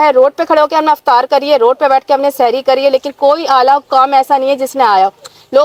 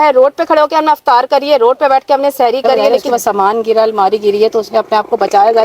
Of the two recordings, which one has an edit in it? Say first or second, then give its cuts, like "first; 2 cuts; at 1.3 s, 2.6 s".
second; 1 cut; at 3.0 s